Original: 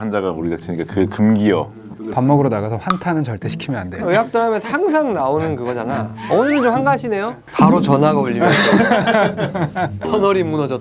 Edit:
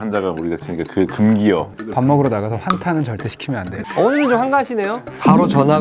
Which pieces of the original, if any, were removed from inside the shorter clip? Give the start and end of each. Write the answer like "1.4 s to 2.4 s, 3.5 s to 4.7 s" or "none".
1.8 s to 2.0 s, 4.0 s to 6.1 s